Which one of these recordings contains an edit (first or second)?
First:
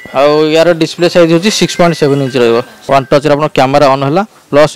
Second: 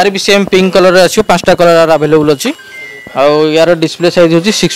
first